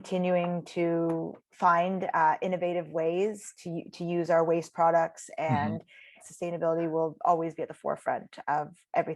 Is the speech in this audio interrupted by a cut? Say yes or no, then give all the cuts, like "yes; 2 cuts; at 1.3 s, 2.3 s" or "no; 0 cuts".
yes; 2 cuts; at 1.4 s, 6.2 s